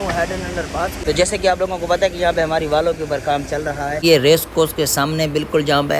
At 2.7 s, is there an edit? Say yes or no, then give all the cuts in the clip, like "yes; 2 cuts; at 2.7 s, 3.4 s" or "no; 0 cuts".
no; 2 cuts; at 1.0 s, 4.0 s